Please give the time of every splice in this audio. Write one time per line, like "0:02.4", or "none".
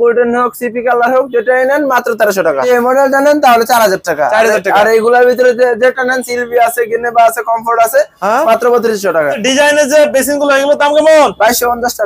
0:02.7
0:09.5